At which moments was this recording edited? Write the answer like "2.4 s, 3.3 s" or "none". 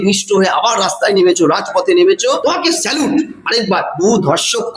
2.4 s, 3.9 s